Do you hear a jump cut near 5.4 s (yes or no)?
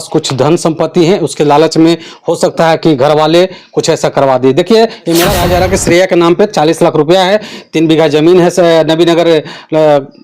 yes